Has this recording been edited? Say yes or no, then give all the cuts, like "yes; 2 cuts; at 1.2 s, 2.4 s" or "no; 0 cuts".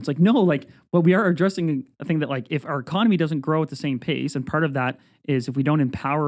no; 0 cuts